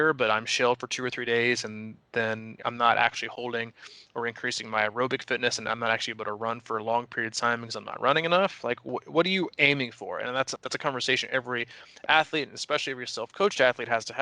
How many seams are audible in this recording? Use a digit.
2